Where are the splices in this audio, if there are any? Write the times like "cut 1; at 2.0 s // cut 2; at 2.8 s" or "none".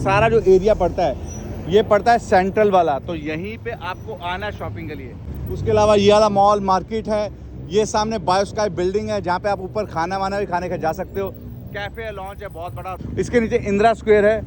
none